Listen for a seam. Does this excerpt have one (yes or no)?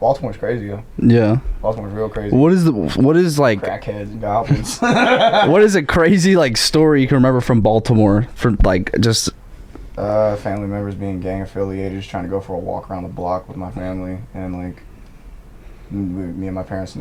no